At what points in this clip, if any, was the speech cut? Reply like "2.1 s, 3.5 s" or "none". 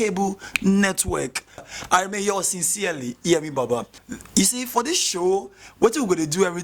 4.0 s